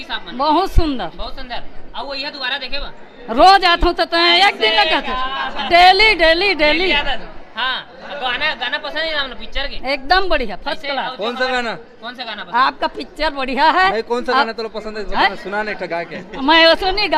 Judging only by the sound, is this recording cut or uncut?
uncut